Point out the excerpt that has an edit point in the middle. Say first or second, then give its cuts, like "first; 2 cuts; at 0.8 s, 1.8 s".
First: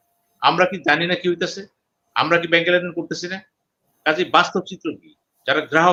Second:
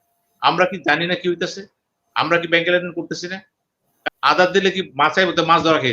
second; 1 cut; at 3.9 s